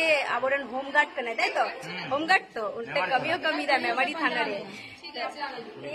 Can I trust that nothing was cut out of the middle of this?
yes; 0 cuts

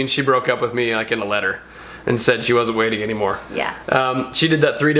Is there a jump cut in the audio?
no; 0 cuts

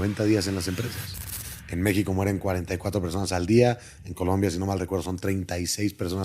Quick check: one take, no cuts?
no; 1 cut; at 1.5 s

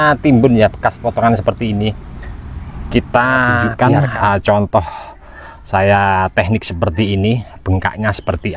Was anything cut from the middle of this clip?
yes; 1 cut; at 3.7 s

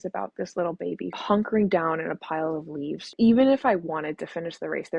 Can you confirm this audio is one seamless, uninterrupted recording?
no; 1 cut; at 1.1 s

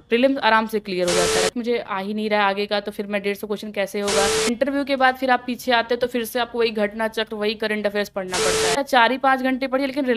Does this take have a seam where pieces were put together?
yes; 3 cuts; at 1.5 s, 4.5 s, 8.8 s

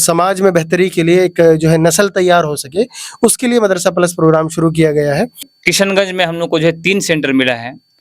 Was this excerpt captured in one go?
no; 1 cut; at 5.5 s

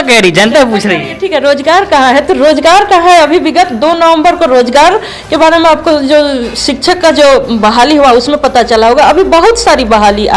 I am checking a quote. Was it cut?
no; 0 cuts

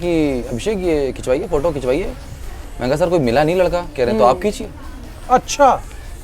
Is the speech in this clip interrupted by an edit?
no; 0 cuts

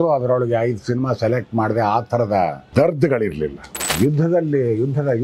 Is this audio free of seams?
no; 2 cuts; at 2.6 s, 3.8 s

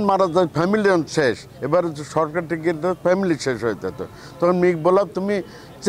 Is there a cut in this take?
no; 0 cuts

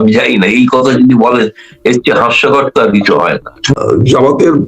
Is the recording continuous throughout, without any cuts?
no; 1 cut; at 3.7 s

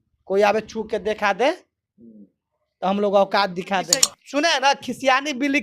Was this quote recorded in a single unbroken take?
no; 1 cut; at 4.2 s

